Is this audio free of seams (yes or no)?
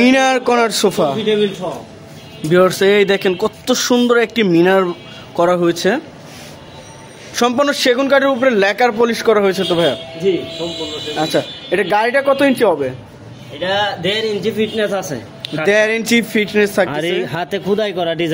yes